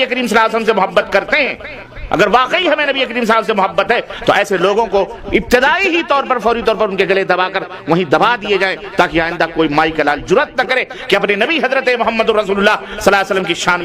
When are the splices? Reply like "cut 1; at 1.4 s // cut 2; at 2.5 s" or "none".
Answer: none